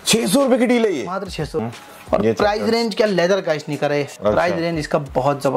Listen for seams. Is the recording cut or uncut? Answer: cut